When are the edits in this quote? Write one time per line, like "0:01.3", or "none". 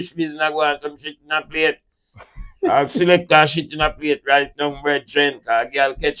none